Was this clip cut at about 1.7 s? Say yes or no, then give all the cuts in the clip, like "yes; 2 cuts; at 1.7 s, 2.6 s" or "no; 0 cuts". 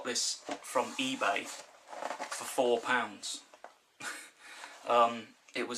no; 1 cut; at 3.3 s